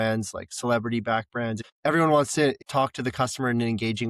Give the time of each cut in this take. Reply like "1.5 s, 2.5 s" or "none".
1.6 s, 2.6 s